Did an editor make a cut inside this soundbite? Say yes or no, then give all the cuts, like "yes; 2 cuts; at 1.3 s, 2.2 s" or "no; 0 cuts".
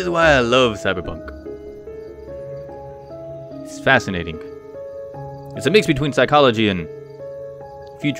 no; 0 cuts